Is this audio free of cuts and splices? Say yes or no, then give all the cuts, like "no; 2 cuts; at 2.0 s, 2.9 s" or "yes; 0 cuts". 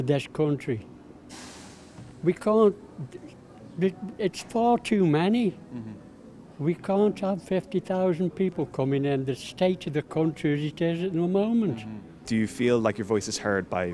yes; 0 cuts